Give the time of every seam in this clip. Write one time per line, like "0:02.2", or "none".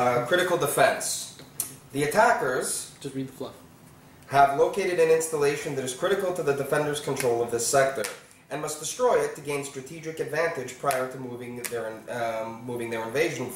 0:07.0

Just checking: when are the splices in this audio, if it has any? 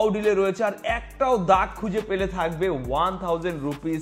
none

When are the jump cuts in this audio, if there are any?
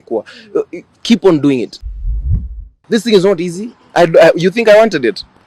0:02.3

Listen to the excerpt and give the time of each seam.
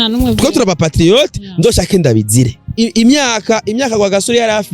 0:02.6

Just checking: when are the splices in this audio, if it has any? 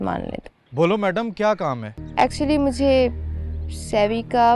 0:01.9

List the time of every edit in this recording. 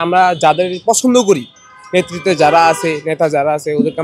none

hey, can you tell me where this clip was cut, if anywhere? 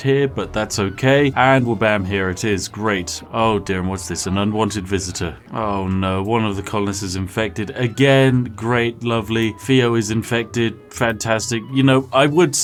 none

